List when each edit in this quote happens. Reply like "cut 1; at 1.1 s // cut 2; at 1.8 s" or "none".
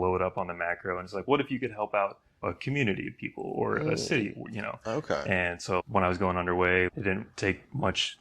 cut 1; at 5.8 s // cut 2; at 6.9 s